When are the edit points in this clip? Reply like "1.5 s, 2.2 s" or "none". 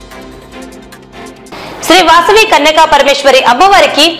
1.4 s